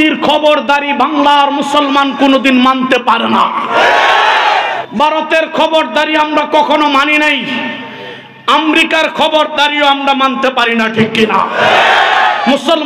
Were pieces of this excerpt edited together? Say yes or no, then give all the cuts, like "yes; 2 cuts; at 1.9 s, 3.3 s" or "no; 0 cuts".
yes; 1 cut; at 4.7 s